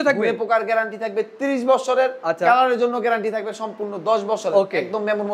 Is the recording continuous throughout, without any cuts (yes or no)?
yes